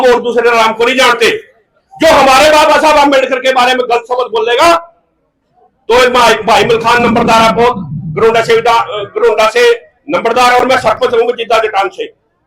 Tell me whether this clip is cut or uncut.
uncut